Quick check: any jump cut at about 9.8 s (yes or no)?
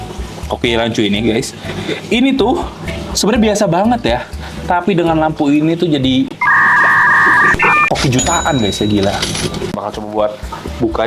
yes